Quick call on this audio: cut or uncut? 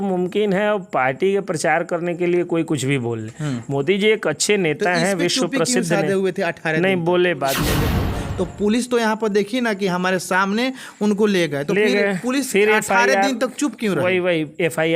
cut